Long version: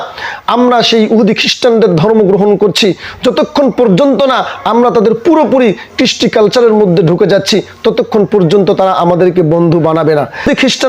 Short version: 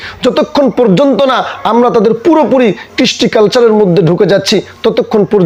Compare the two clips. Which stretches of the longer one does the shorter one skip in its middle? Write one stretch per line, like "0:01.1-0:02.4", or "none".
none